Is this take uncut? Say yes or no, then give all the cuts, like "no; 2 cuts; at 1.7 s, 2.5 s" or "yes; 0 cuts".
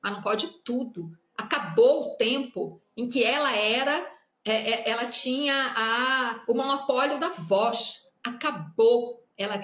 yes; 0 cuts